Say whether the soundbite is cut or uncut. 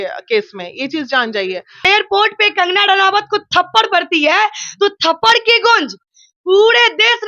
cut